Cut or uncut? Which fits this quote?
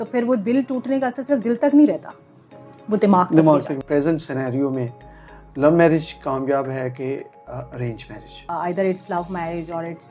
cut